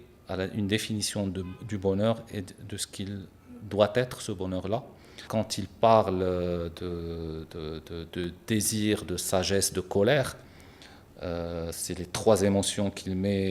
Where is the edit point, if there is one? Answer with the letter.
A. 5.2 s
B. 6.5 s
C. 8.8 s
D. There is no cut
A